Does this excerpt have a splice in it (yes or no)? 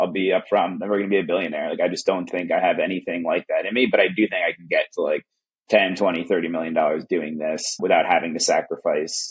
no